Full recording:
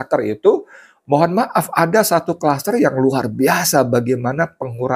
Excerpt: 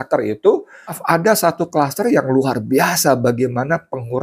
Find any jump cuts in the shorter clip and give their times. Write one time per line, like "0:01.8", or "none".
0:00.9